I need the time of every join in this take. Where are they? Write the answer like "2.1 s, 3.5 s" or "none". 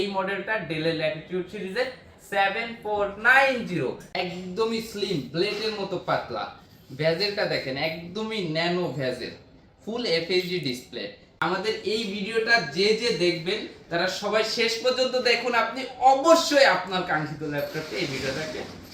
4.0 s, 11.3 s